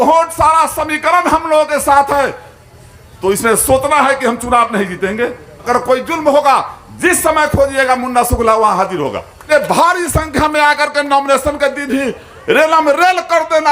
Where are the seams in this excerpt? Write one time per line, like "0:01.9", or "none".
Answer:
0:05.5
0:09.5